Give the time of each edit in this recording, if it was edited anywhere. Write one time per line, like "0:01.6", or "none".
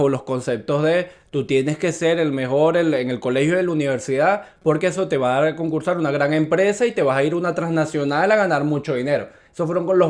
none